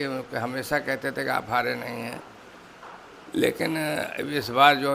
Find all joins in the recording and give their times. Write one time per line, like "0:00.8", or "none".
none